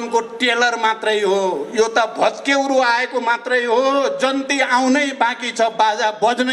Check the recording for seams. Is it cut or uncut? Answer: uncut